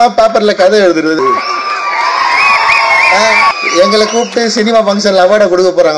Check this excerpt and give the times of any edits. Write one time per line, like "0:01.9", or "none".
0:01.2
0:03.5